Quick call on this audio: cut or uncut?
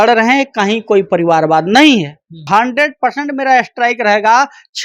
cut